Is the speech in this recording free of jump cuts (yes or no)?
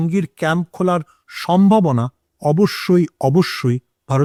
yes